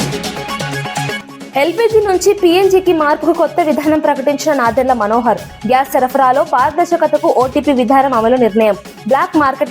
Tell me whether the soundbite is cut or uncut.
cut